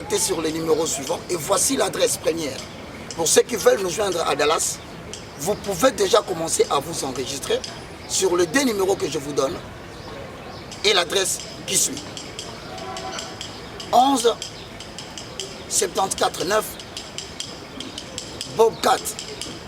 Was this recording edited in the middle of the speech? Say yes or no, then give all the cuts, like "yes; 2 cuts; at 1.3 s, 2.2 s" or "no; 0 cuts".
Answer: no; 0 cuts